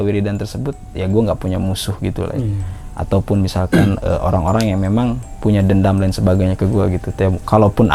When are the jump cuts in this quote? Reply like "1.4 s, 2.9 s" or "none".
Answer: none

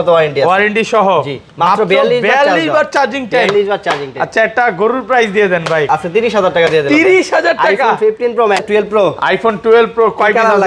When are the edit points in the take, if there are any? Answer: 5.9 s, 8.6 s

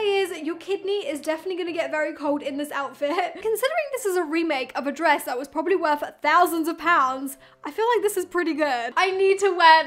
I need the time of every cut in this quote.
3.4 s, 8.9 s

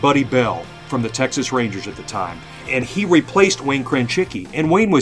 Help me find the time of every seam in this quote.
2.7 s

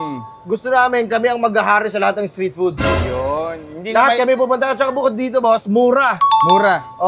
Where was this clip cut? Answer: none

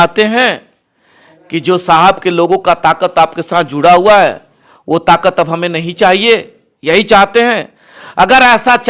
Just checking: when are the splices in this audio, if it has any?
none

